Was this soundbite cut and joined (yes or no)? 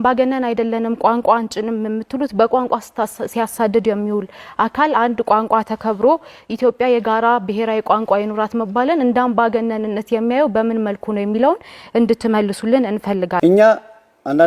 yes